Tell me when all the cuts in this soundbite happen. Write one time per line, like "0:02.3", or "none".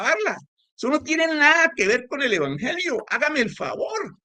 none

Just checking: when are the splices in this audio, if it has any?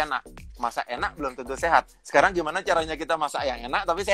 none

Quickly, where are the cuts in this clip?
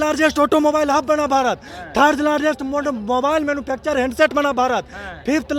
none

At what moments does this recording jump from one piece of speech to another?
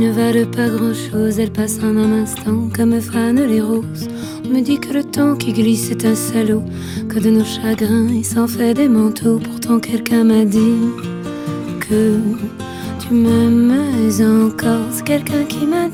none

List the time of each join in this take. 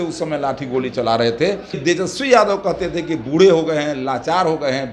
0:01.8

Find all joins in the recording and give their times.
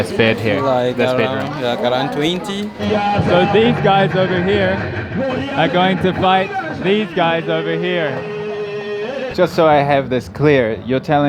0:02.8
0:09.3

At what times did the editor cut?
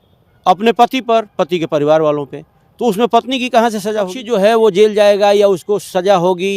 0:04.2

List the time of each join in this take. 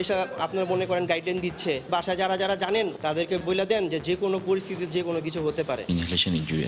0:01.9
0:03.4
0:05.8

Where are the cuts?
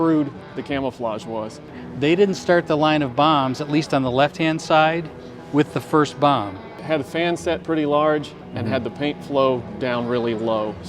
0:01.8
0:06.8

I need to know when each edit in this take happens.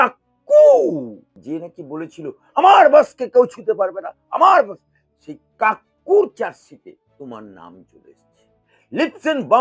0:01.3
0:07.0

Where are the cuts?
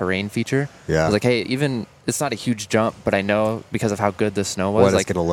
none

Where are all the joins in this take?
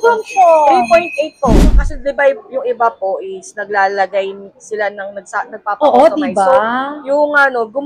0:01.7

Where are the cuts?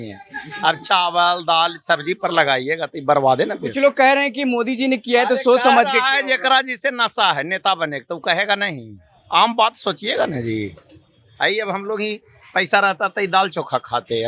none

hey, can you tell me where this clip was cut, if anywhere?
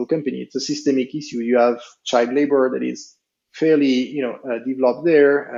none

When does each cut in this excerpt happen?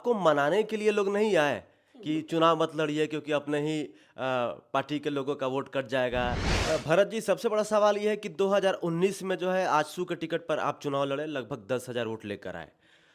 0:06.5

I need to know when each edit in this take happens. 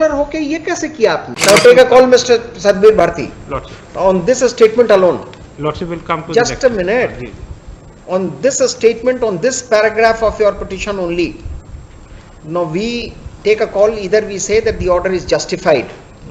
0:01.3

